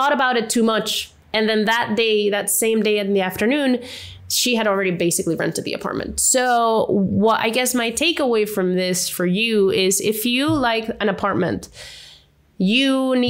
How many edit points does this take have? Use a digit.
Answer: 0